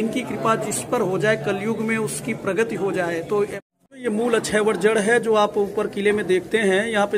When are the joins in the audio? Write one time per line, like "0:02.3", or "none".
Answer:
0:03.6